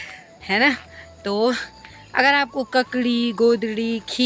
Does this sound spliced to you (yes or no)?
no